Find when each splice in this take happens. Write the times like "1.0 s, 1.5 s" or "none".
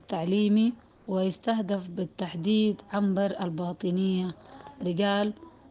0.9 s